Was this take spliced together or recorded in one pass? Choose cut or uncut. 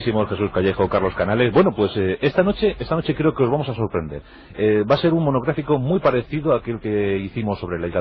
uncut